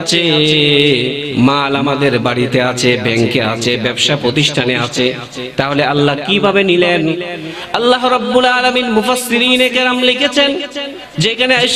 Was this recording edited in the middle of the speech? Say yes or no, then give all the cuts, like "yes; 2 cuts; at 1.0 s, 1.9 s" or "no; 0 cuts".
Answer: no; 0 cuts